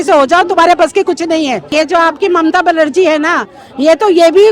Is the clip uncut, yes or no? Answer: no